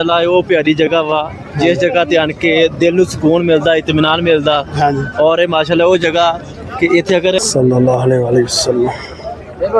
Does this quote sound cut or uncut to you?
cut